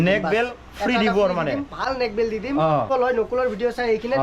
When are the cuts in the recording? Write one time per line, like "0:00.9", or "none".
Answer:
0:02.9